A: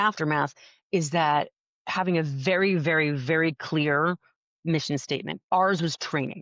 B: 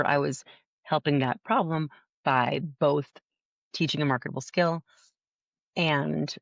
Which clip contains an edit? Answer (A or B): A